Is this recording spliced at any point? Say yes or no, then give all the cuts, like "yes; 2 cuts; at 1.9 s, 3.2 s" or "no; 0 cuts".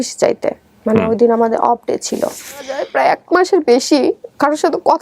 yes; 1 cut; at 2.9 s